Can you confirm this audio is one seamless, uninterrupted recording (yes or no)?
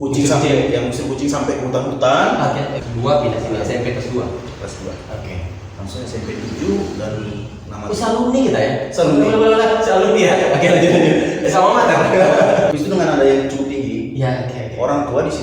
no